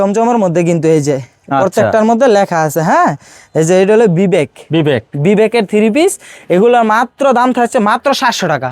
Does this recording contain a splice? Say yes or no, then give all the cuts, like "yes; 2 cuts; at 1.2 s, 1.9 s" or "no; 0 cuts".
no; 0 cuts